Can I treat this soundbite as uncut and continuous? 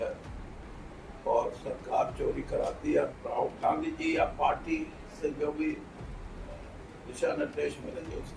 no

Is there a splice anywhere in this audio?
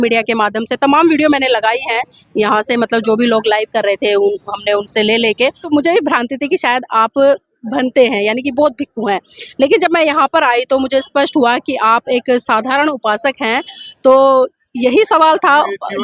yes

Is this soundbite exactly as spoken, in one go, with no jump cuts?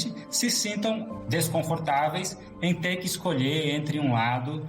no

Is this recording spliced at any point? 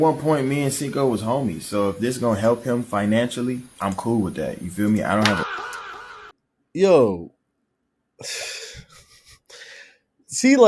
no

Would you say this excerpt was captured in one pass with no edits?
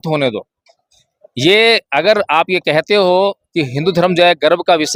yes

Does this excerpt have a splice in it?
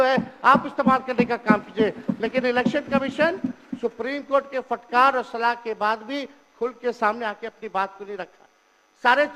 no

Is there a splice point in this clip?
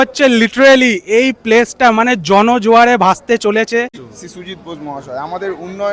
yes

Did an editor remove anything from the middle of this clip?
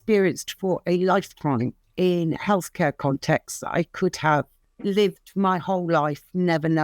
yes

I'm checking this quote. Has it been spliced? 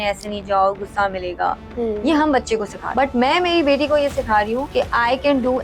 yes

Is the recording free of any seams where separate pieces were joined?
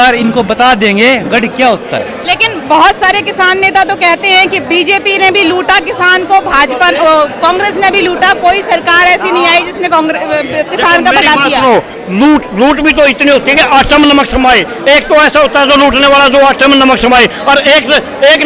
no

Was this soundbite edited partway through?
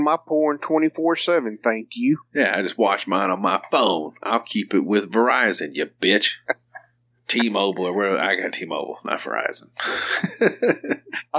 no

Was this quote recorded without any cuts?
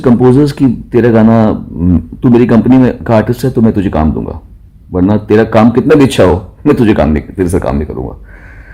yes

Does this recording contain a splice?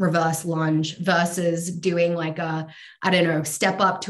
no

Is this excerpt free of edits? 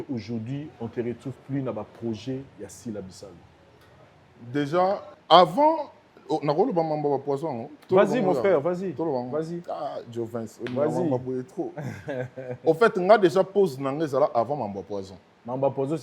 no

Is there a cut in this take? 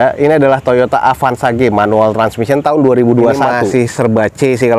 yes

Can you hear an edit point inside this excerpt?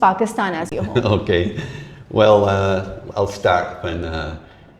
no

